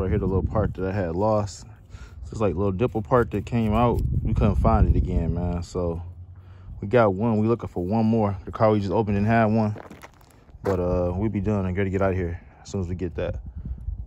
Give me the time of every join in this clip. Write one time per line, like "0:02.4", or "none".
none